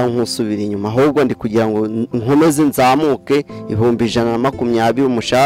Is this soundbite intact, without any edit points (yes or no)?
yes